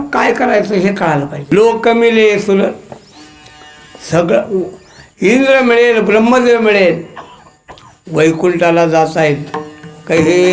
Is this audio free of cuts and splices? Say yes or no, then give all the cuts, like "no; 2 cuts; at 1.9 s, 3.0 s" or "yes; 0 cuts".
no; 1 cut; at 1.4 s